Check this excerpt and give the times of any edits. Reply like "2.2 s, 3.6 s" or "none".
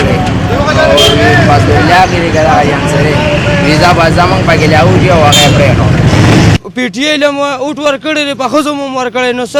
6.5 s